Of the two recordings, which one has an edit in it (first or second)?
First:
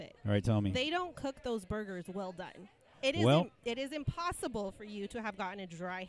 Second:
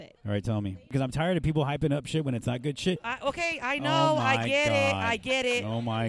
second